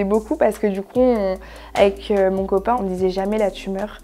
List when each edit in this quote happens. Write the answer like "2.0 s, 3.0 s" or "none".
2.8 s